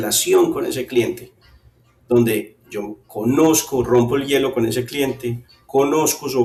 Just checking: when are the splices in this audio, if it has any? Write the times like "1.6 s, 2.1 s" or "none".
none